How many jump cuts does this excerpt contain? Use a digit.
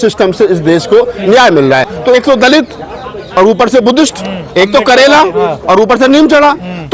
1